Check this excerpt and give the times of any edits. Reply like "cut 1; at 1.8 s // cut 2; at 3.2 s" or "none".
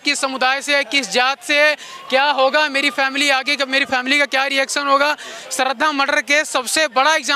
none

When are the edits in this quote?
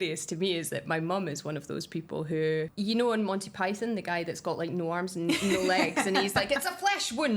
cut 1; at 2.7 s

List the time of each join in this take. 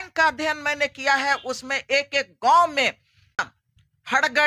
cut 1; at 3.5 s

